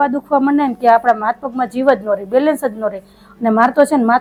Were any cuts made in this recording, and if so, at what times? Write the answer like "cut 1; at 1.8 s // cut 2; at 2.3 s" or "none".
none